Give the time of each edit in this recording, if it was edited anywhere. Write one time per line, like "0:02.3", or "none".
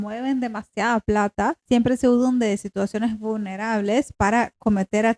0:01.6